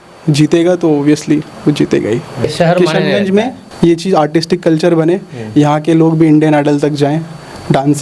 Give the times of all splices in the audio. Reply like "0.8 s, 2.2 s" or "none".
2.4 s